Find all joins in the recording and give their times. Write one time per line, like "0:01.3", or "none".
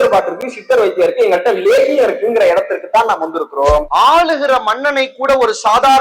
0:03.9